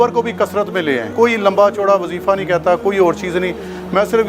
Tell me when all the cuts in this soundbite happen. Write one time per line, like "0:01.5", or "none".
0:01.1